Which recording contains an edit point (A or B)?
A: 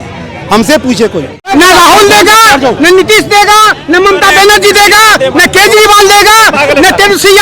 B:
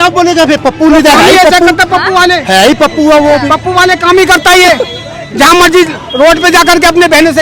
A